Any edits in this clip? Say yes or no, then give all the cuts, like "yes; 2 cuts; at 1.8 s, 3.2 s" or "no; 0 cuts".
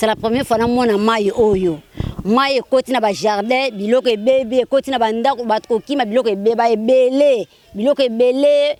no; 0 cuts